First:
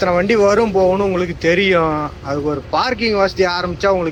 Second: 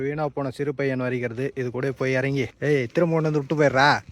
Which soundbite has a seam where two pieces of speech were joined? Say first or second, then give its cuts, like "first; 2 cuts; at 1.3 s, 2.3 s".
second; 1 cut; at 2.5 s